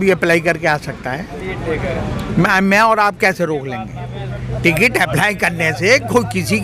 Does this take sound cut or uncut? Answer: uncut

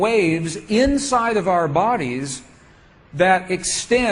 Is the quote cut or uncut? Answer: uncut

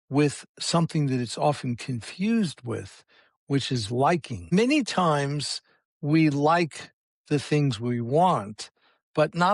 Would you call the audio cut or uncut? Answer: cut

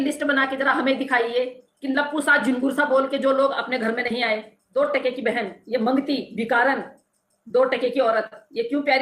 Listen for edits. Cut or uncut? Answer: cut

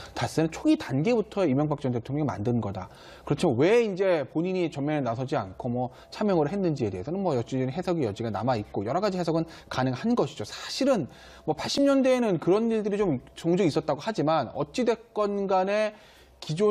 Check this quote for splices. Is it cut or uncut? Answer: uncut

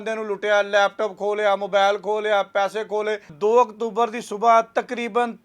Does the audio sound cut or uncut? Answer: cut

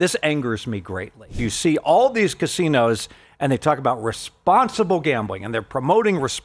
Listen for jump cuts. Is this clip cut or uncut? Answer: cut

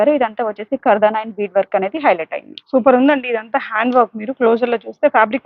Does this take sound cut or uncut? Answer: uncut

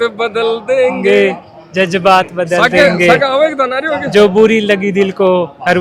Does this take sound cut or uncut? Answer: uncut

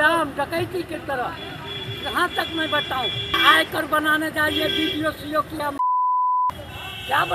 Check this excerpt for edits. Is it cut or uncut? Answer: cut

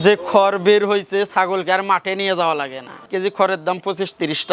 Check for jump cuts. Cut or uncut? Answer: cut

